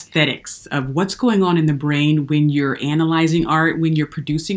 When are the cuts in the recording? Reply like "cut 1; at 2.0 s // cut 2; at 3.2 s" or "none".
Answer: none